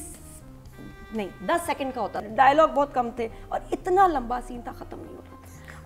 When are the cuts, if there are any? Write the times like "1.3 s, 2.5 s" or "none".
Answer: 2.2 s